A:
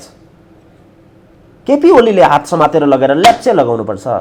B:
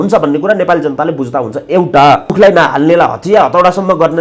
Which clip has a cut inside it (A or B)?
B